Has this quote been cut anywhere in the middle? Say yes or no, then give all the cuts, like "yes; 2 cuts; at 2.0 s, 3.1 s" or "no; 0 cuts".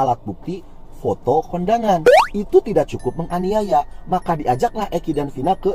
no; 0 cuts